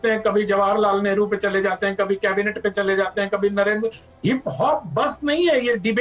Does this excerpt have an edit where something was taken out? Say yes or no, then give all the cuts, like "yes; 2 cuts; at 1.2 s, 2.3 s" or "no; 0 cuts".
no; 0 cuts